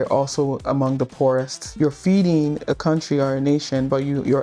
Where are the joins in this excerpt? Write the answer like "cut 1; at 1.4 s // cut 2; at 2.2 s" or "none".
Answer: cut 1; at 1.7 s